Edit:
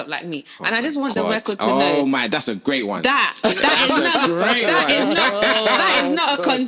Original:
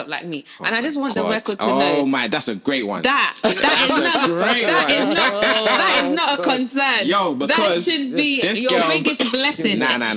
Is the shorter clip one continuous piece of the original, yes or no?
yes